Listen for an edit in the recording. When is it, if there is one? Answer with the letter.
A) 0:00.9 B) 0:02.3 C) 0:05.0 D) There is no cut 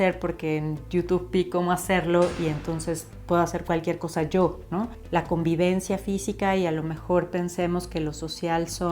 C